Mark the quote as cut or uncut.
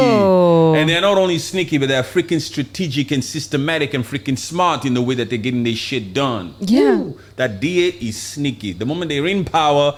uncut